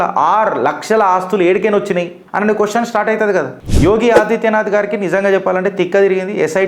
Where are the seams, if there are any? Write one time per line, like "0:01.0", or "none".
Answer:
0:03.6